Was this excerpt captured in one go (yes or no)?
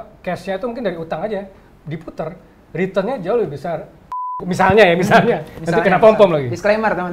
no